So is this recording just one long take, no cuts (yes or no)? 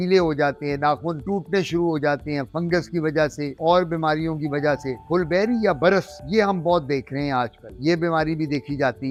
yes